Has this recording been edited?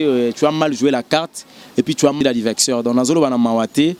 no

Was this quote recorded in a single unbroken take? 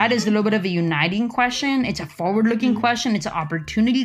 yes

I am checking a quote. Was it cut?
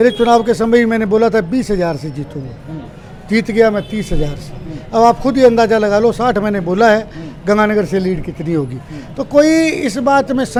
no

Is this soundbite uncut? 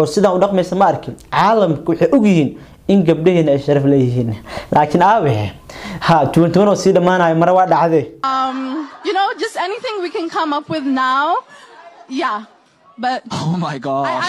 yes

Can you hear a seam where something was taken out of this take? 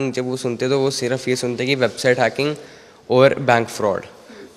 no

